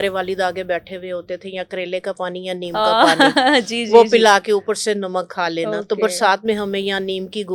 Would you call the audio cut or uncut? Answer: uncut